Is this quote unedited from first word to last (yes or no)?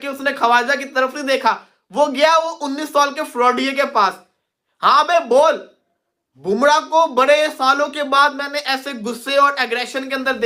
yes